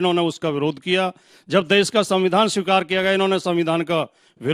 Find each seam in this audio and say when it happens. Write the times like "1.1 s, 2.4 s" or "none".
1.3 s

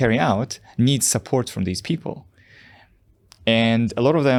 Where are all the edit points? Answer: none

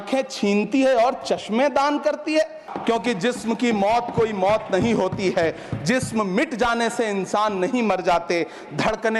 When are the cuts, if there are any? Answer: 2.7 s

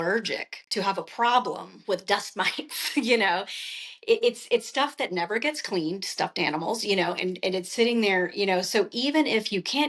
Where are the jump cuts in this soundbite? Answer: none

